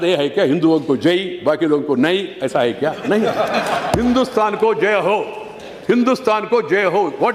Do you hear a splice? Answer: no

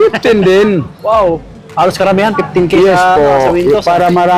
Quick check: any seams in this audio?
no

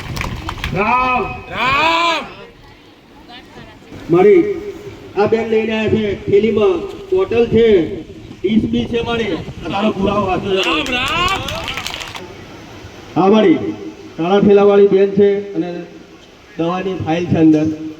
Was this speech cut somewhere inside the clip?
yes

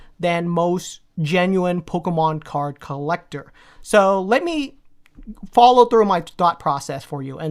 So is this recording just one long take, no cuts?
no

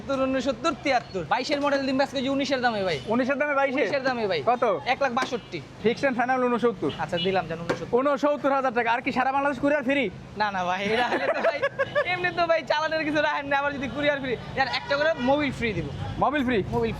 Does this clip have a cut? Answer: yes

